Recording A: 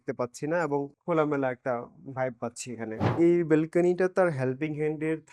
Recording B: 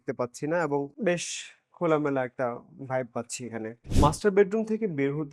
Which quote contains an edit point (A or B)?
A